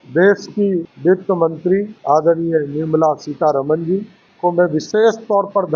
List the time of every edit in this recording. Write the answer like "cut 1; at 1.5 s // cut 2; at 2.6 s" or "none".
cut 1; at 0.9 s // cut 2; at 1.9 s // cut 3; at 4.2 s